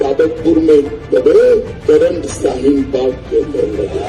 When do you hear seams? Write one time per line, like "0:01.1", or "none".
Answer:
0:01.7